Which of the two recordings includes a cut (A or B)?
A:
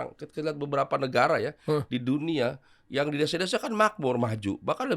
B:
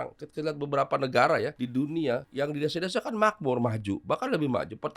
B